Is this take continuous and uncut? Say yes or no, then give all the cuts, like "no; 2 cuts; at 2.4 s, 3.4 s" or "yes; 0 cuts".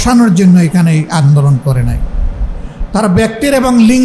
yes; 0 cuts